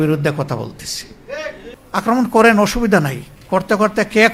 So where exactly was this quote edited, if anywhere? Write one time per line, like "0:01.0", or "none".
0:01.7

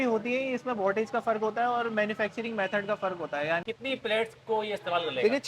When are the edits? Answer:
0:03.7

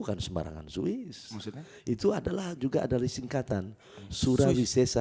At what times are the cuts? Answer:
none

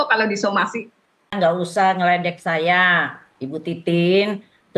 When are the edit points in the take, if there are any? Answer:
0:01.3

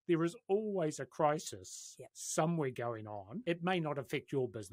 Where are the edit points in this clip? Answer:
0:03.3

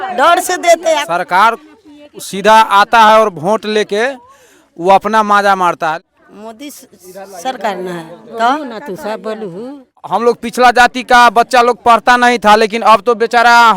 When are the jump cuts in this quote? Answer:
0:01.0
0:06.1
0:10.0

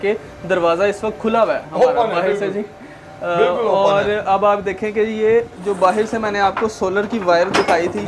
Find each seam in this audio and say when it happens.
none

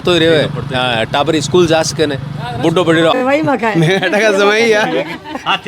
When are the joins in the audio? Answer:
0:03.1

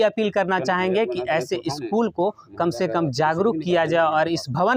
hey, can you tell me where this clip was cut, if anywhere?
none

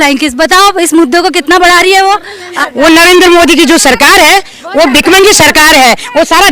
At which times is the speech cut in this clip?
0:02.6

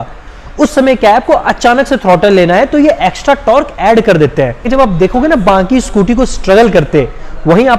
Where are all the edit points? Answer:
none

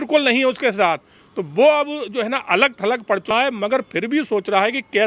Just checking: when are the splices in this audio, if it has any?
none

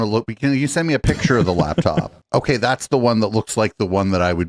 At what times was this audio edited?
none

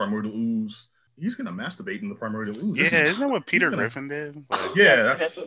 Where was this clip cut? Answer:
0:01.0

